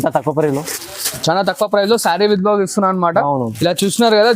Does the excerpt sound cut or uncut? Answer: uncut